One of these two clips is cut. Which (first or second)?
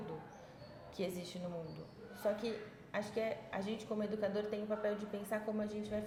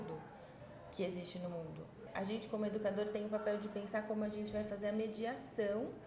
second